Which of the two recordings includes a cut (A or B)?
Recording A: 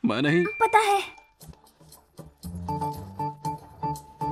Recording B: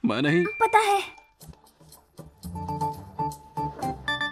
B